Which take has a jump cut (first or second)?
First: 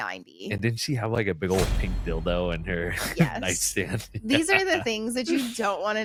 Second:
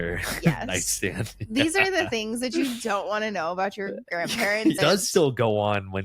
second